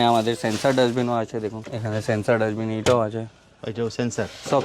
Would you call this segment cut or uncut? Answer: cut